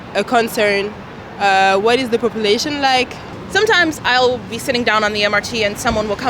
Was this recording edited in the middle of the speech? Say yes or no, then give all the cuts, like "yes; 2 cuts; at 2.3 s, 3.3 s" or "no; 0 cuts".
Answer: yes; 1 cut; at 3.4 s